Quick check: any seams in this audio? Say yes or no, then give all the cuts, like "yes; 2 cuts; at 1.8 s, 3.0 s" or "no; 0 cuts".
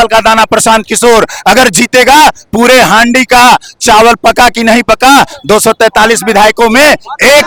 no; 0 cuts